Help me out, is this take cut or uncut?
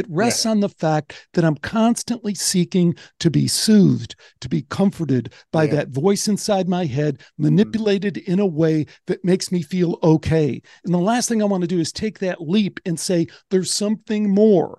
uncut